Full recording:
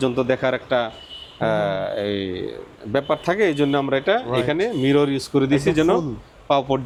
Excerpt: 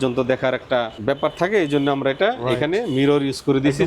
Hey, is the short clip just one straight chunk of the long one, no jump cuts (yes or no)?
no